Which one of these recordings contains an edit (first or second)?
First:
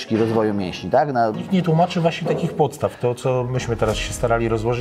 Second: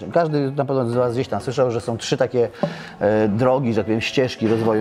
first